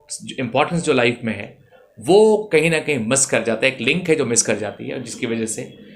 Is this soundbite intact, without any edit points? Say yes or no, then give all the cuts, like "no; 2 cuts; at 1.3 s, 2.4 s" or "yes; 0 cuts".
yes; 0 cuts